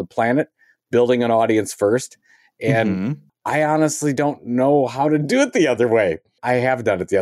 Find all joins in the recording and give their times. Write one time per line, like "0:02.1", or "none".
0:03.3
0:06.3